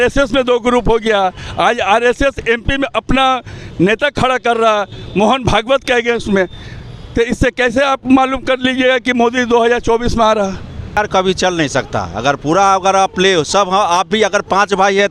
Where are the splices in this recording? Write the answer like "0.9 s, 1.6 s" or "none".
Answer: 10.9 s